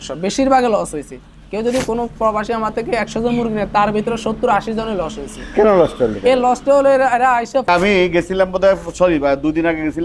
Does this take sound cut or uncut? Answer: cut